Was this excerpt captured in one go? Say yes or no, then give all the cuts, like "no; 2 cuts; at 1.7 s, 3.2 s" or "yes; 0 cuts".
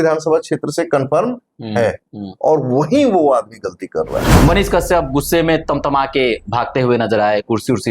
no; 1 cut; at 4.2 s